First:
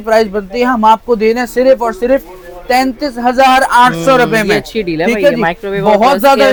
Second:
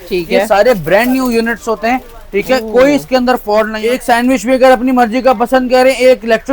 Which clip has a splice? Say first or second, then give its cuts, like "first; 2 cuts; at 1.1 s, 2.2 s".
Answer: second; 1 cut; at 3.8 s